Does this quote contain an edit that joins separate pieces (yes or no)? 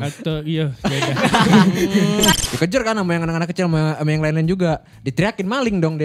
yes